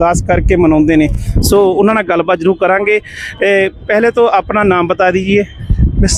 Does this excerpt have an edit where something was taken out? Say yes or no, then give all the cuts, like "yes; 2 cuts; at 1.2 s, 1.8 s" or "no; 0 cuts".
no; 0 cuts